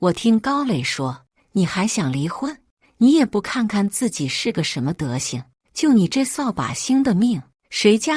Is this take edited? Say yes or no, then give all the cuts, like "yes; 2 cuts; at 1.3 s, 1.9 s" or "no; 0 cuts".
no; 0 cuts